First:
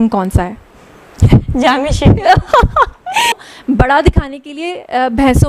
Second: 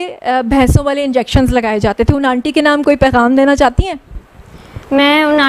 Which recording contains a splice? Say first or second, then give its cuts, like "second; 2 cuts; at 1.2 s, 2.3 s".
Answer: first; 1 cut; at 3.3 s